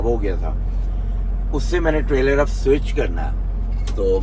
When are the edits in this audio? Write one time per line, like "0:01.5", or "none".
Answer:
none